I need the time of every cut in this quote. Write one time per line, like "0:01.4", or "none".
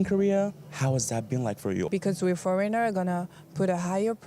0:01.9